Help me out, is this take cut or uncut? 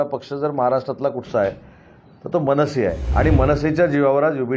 cut